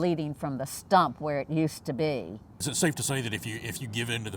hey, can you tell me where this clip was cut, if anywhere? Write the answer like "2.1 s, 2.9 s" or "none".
2.6 s